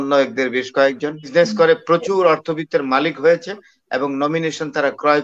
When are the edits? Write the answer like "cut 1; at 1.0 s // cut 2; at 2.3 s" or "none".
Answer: cut 1; at 1.3 s